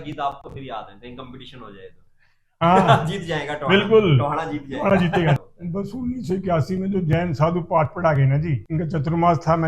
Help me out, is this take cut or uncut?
cut